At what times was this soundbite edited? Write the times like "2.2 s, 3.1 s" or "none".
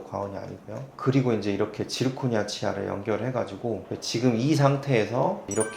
0.9 s, 3.8 s